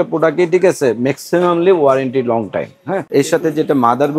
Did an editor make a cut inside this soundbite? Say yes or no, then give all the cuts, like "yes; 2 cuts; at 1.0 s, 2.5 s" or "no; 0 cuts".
yes; 1 cut; at 2.9 s